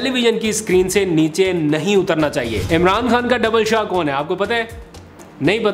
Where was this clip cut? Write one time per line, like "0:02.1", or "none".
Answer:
0:02.6